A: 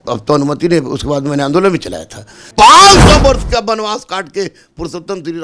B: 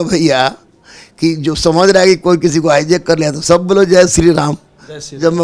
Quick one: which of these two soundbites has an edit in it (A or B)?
A